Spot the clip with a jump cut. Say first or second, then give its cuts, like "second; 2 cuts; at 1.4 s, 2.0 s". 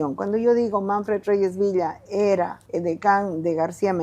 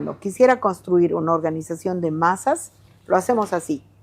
first; 1 cut; at 2.6 s